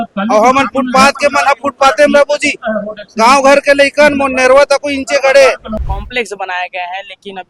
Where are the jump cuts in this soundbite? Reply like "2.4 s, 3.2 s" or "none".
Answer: 5.7 s